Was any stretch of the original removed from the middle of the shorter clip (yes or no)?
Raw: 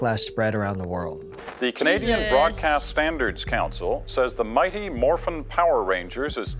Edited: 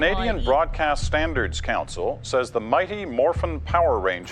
no